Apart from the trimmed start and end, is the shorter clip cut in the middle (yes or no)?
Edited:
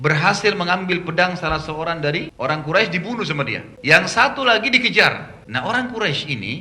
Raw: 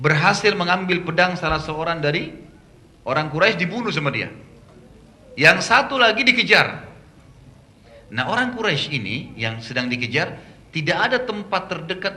yes